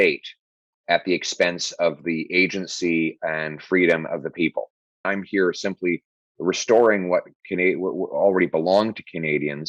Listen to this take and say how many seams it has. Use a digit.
1